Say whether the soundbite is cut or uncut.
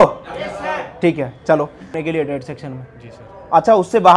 cut